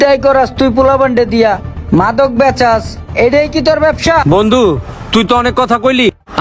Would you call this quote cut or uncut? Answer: uncut